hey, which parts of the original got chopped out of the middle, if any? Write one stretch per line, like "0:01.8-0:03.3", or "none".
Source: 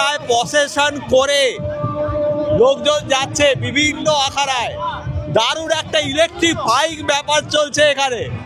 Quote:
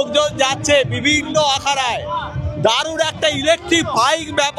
none